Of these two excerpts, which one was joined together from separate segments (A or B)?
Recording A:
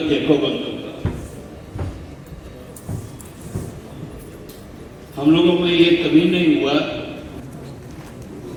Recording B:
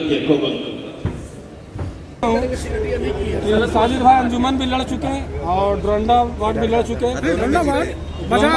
B